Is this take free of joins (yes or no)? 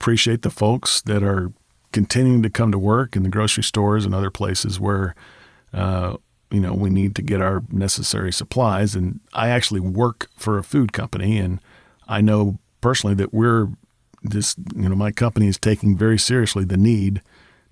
yes